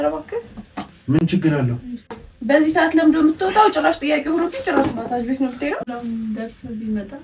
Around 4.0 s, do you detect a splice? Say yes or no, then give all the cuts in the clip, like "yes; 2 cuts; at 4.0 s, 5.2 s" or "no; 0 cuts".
no; 2 cuts; at 2.3 s, 5.9 s